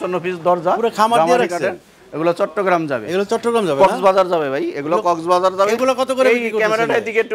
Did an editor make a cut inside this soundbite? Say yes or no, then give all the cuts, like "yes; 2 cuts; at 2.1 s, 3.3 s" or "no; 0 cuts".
no; 0 cuts